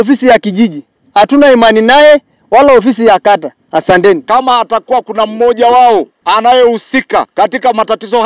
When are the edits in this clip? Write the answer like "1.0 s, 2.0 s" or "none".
4.2 s, 6.1 s, 7.3 s